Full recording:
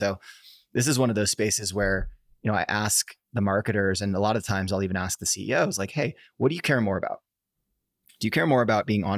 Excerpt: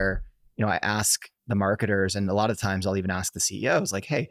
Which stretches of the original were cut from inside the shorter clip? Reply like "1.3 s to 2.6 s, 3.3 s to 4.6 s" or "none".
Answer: none